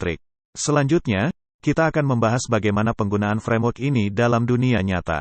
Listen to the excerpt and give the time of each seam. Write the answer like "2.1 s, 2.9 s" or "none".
none